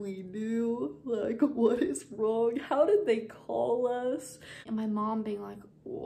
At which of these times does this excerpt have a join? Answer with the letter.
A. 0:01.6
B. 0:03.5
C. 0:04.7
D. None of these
C